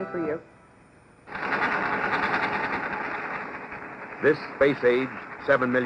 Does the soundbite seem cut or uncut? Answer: cut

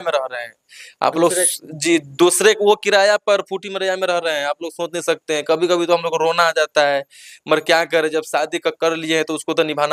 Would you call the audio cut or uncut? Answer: uncut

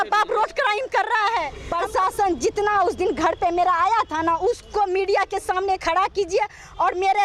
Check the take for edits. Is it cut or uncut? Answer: cut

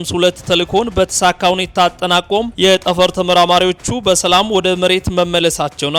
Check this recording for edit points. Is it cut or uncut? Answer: uncut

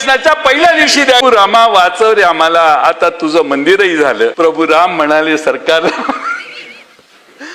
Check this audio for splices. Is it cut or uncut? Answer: cut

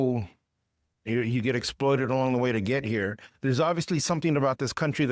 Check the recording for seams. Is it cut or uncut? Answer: cut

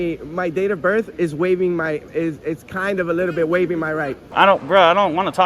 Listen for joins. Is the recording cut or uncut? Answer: cut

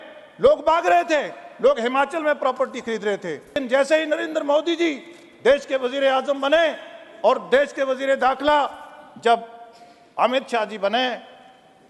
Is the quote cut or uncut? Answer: cut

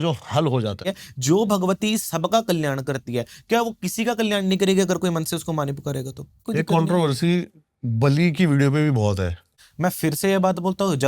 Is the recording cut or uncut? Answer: cut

